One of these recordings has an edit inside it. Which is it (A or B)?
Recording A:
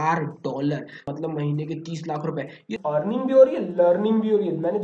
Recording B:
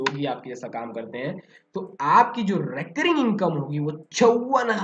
A